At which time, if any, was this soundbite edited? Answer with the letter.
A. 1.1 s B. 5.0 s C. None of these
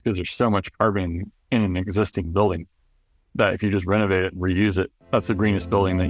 B